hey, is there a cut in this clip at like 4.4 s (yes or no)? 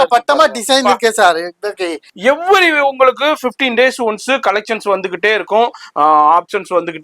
no